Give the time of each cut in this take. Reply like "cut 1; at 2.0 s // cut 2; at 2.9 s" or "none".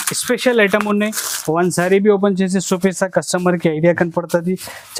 none